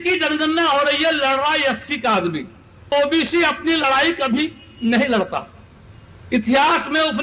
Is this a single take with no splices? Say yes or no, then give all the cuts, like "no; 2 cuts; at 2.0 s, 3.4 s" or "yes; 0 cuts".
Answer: no; 1 cut; at 2.9 s